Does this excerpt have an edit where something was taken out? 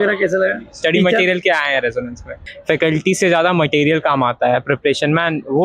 yes; 1 cut; at 2.4 s

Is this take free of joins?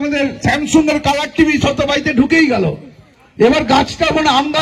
yes; 0 cuts

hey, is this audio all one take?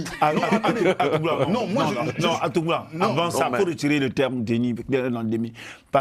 yes; 0 cuts

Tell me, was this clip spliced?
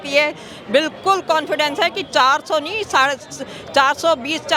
no; 0 cuts

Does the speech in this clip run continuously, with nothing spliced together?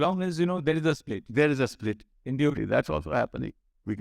no; 1 cut; at 2.6 s

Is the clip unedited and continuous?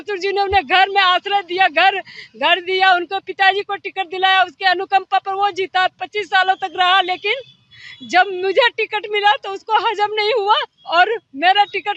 yes; 0 cuts

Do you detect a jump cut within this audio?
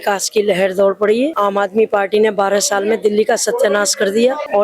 no; 0 cuts

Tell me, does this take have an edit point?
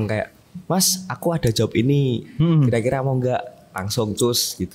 no; 0 cuts

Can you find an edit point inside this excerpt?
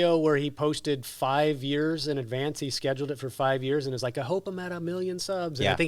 no; 0 cuts

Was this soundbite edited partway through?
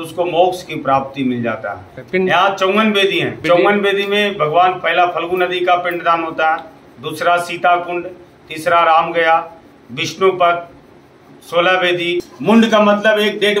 yes; 3 cuts; at 1.9 s, 3.3 s, 12.3 s

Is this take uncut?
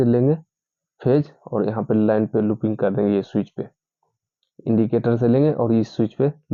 yes; 0 cuts

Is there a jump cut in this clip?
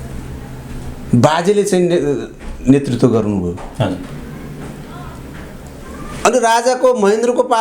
no; 0 cuts

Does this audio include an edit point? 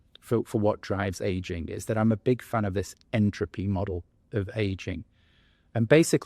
no; 0 cuts

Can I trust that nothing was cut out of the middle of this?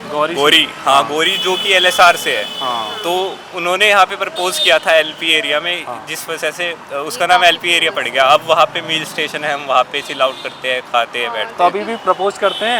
yes; 0 cuts

